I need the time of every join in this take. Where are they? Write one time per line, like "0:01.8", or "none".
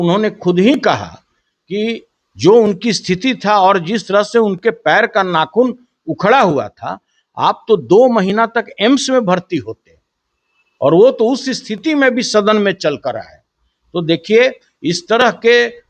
none

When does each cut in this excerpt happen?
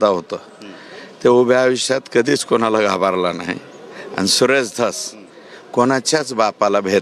none

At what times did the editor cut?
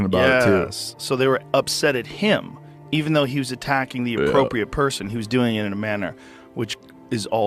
none

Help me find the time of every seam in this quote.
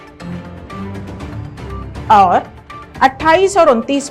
0:02.1

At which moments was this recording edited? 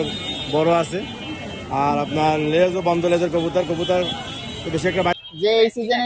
0:05.2

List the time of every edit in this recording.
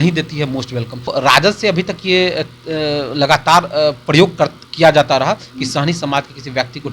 0:01.1

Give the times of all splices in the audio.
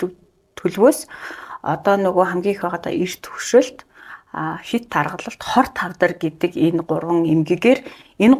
none

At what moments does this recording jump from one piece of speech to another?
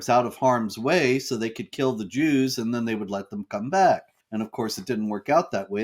0:04.2

